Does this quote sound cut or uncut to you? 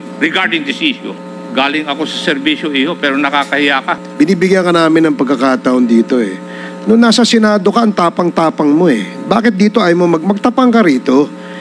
cut